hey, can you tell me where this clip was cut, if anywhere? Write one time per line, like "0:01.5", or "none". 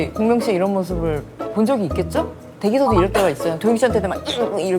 0:02.4